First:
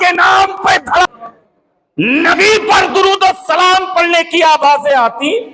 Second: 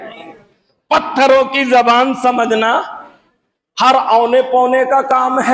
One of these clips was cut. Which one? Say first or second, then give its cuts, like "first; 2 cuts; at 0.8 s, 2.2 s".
first; 1 cut; at 1.0 s